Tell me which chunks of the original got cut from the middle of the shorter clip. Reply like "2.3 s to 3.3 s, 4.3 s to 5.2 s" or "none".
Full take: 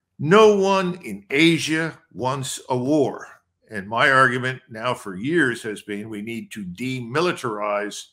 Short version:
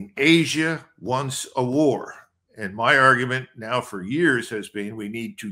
none